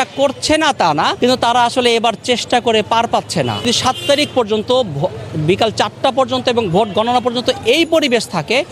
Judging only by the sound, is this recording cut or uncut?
cut